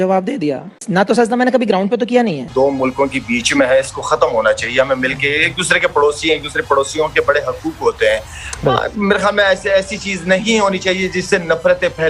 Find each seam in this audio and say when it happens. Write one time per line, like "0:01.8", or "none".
0:02.5